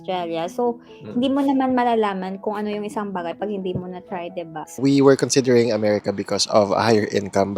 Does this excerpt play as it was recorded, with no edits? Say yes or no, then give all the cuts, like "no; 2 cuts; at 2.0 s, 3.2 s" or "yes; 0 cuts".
no; 1 cut; at 4.8 s